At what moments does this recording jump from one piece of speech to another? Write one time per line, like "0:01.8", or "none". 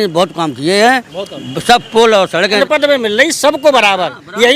0:02.6